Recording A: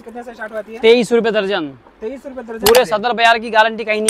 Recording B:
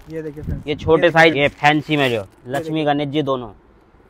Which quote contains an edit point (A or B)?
B